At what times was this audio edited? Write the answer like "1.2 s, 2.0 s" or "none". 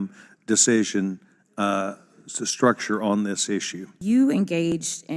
3.9 s